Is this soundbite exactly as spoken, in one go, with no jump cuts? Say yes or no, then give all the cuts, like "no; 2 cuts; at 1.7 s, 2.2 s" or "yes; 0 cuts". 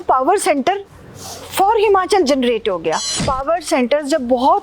no; 1 cut; at 3.1 s